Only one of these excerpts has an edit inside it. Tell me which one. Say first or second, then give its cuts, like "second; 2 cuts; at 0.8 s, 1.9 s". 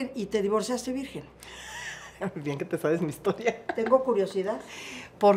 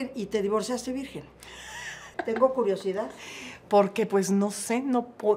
second; 1 cut; at 2.1 s